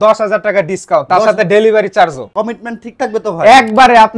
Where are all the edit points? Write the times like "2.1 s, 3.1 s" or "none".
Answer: 2.2 s